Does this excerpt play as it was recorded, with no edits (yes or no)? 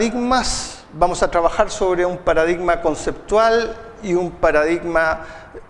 no